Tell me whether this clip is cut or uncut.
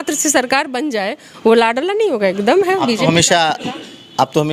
uncut